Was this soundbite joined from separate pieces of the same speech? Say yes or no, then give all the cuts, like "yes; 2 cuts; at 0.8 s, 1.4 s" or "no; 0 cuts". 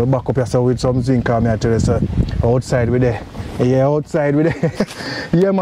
no; 0 cuts